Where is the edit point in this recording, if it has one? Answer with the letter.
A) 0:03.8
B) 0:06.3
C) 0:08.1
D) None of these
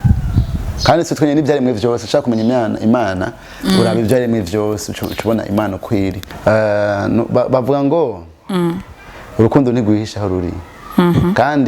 B